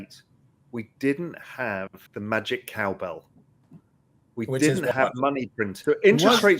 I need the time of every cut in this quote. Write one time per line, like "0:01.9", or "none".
0:02.0
0:05.7